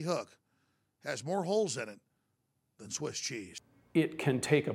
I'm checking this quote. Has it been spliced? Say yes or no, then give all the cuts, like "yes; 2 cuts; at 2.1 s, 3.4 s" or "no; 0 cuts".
yes; 1 cut; at 3.5 s